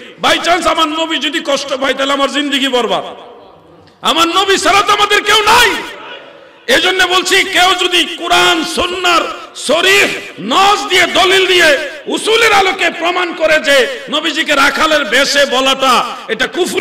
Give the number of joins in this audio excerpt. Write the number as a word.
zero